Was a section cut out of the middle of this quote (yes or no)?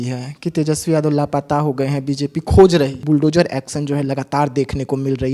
yes